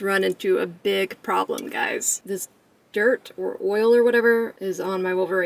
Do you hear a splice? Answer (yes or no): yes